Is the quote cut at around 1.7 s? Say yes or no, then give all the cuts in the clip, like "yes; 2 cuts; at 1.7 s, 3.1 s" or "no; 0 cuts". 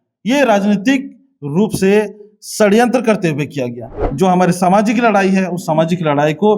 no; 1 cut; at 3.9 s